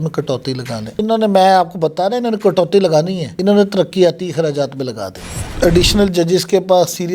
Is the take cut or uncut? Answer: cut